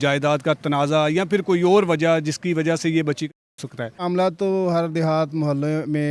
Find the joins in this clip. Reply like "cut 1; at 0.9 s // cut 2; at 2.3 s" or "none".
cut 1; at 4.0 s